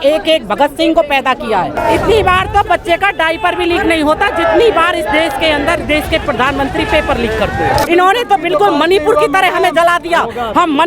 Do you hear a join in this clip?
yes; 2 cuts; at 1.8 s, 7.8 s

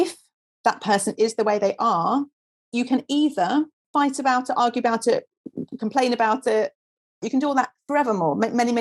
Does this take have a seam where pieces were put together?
yes; 3 cuts; at 2.7 s, 3.9 s, 7.2 s

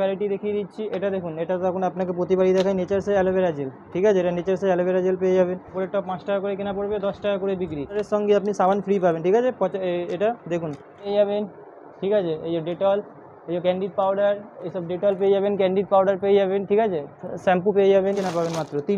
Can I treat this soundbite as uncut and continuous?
no; 4 cuts; at 5.7 s, 8.0 s, 11.1 s, 18.2 s

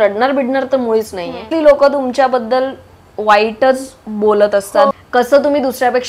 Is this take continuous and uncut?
no; 2 cuts; at 1.5 s, 4.9 s

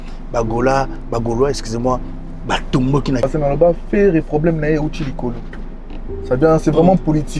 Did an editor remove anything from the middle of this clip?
yes; 1 cut; at 3.2 s

